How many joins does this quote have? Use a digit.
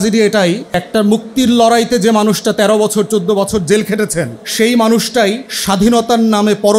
3